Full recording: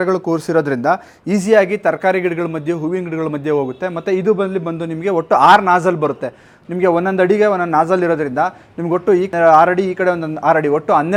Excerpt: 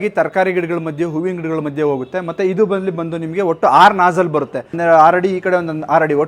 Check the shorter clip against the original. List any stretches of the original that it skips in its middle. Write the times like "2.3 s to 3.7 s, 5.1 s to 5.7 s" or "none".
6.4 s to 9.3 s